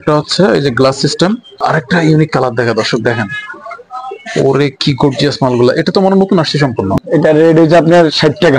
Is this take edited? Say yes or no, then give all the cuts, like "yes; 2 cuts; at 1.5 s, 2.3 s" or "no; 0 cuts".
yes; 2 cuts; at 1.6 s, 7.0 s